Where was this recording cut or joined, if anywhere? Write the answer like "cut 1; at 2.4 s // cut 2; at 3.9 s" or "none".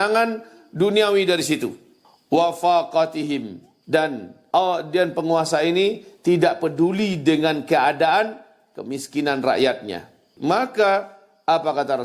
cut 1; at 10.2 s